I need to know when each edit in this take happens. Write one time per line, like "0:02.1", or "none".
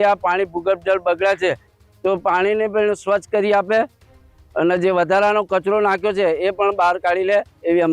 none